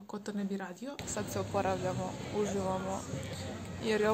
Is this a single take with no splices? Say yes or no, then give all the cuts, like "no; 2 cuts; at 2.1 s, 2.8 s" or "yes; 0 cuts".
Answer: no; 1 cut; at 1.0 s